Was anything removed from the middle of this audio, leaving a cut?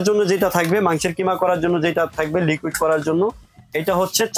no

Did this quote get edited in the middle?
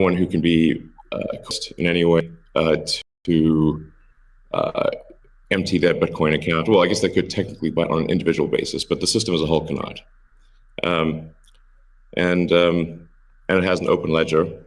yes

